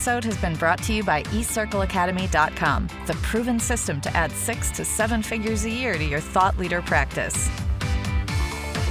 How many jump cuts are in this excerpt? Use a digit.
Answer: 1